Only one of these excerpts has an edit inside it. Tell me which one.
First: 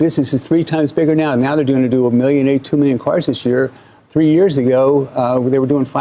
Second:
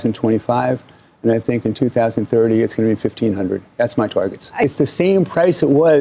second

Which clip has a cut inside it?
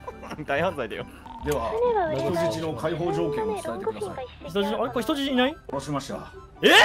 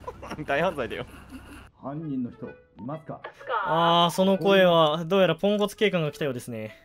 first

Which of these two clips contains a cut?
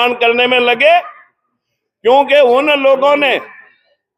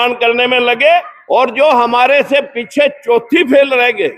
second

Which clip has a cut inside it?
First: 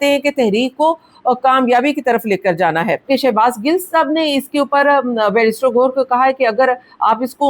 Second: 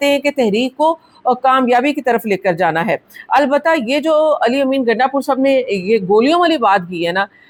first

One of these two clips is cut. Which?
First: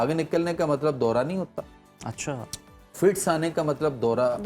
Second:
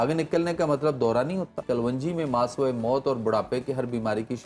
second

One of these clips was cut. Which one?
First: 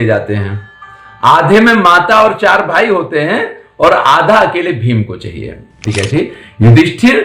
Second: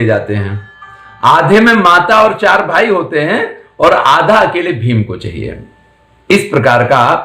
first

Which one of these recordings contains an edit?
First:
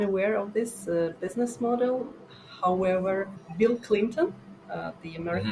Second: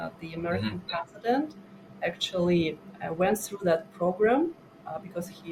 first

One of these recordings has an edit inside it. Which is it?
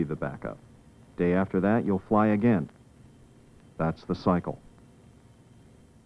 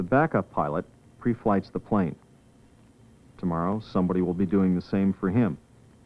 first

